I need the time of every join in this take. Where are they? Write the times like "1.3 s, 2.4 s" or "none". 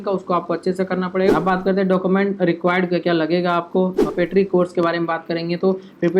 1.3 s, 4.1 s